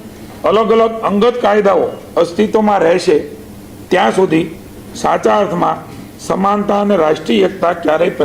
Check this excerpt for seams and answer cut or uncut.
uncut